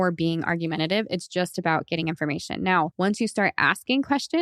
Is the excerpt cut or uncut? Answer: cut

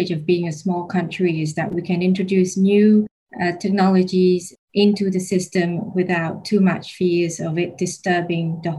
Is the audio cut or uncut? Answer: uncut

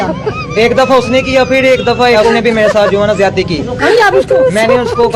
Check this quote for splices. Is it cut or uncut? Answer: uncut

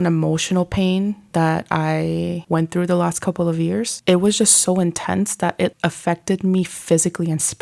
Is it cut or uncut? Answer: cut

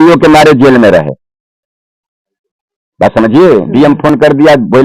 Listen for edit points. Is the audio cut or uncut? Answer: uncut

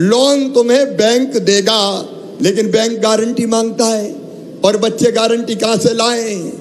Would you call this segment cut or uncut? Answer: uncut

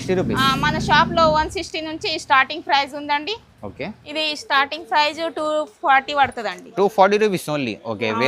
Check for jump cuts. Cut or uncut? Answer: cut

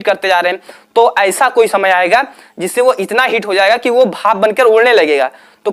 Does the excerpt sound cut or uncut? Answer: uncut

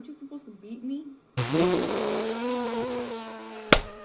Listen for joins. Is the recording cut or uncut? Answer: cut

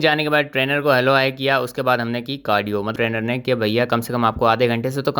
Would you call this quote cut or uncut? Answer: cut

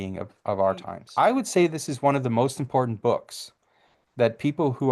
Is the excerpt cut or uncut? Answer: cut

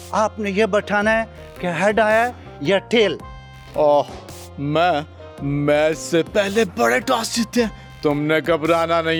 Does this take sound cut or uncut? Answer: uncut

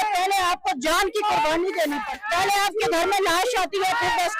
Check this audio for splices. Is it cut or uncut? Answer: cut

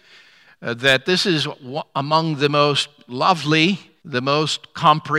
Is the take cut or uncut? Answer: cut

